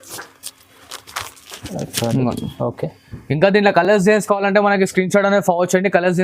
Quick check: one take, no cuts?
yes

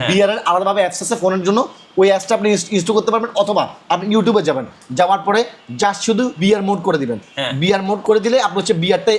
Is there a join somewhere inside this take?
yes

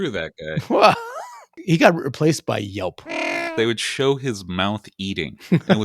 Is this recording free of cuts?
no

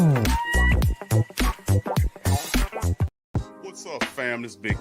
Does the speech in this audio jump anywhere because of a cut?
yes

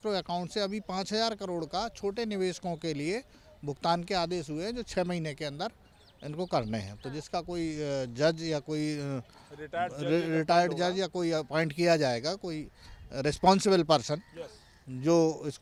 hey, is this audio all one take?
yes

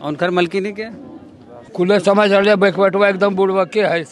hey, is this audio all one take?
no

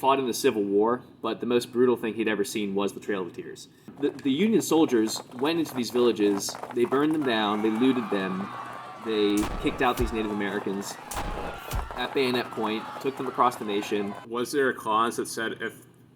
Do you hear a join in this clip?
yes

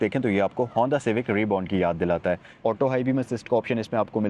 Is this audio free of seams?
no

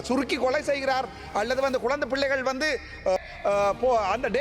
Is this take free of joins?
no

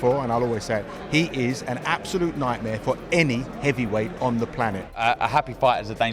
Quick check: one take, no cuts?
no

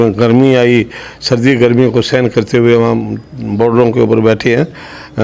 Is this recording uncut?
yes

